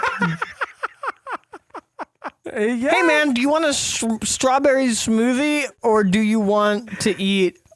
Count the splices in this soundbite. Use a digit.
2